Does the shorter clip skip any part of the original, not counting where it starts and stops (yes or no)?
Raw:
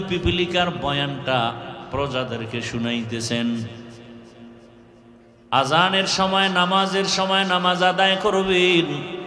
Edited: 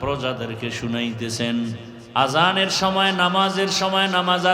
yes